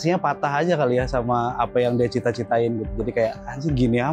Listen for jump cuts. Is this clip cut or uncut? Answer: uncut